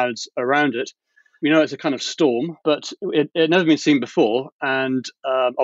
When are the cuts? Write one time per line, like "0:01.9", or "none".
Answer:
none